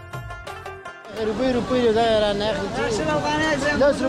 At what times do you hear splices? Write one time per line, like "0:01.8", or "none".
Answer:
0:01.2